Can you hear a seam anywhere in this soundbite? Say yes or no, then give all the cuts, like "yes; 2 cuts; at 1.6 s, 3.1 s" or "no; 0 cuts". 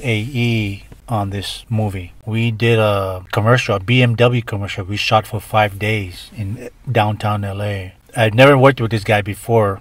yes; 1 cut; at 2.2 s